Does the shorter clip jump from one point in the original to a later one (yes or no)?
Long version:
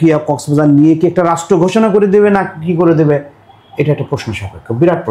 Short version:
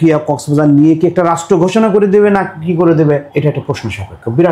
yes